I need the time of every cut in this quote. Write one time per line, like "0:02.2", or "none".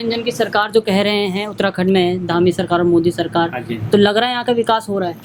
none